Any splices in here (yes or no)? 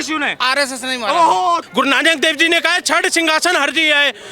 yes